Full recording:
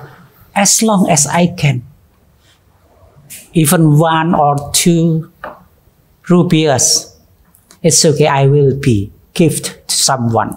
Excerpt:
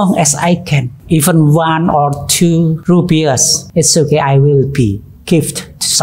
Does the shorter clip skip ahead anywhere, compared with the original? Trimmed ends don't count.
yes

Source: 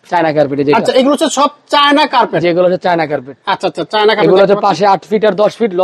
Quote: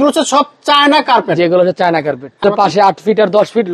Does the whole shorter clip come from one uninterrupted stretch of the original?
no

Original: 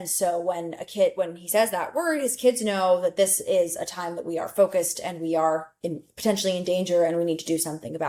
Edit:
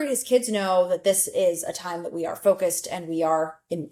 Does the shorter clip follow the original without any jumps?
yes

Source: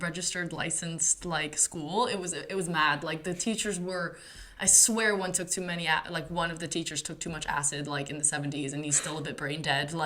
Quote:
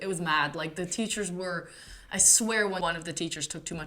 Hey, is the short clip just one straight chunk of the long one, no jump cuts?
no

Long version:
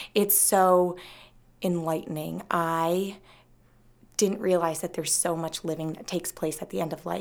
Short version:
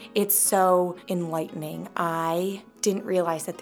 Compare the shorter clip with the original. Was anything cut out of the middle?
yes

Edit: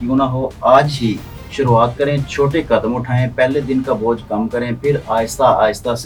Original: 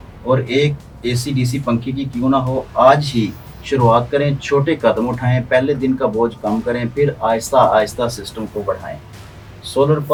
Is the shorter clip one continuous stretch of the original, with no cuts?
yes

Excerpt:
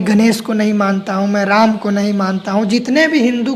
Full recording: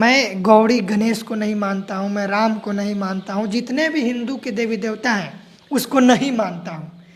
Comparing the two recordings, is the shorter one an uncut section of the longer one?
yes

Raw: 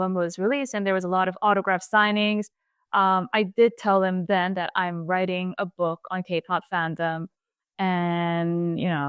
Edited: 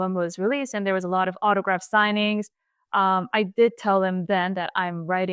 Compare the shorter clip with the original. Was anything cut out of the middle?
no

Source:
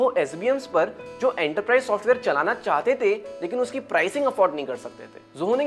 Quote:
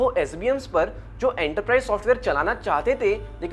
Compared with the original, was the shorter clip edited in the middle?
no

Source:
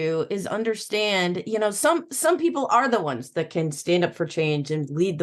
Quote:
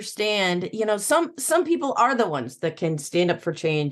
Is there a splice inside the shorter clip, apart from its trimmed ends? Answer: no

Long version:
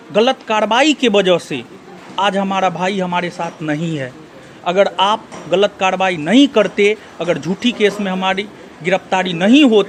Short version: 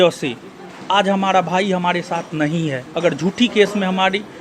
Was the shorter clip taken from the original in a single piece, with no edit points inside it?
no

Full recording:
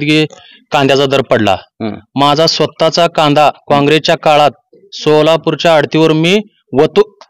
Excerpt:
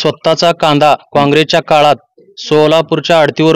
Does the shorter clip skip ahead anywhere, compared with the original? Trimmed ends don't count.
no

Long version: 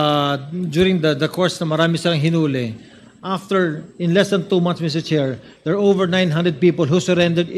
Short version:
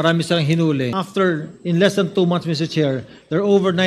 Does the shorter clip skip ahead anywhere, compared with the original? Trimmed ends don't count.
yes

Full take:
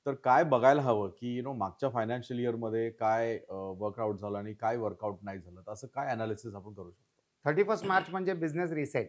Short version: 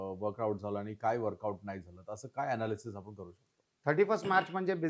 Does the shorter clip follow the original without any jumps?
yes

